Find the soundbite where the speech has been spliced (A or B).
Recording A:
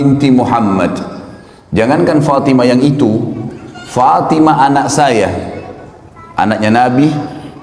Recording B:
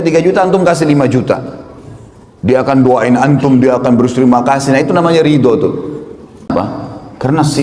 B